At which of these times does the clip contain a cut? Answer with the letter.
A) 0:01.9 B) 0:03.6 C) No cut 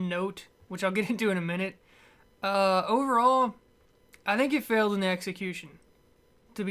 A